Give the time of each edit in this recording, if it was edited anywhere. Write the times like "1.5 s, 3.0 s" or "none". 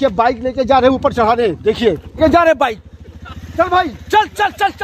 2.2 s